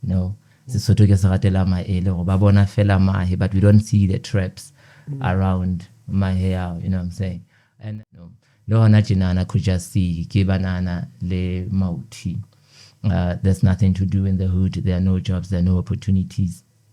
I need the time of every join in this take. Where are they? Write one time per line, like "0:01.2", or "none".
0:07.8